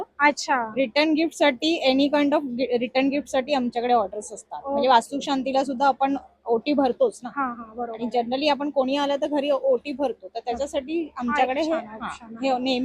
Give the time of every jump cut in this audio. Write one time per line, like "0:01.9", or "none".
none